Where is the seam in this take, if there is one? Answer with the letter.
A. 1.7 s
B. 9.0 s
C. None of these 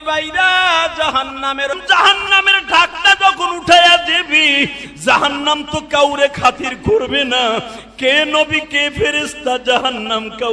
A